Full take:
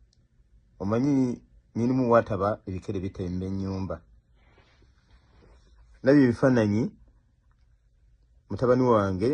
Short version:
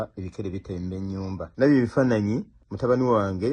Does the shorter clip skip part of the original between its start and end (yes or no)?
yes